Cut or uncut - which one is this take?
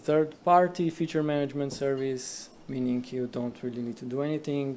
uncut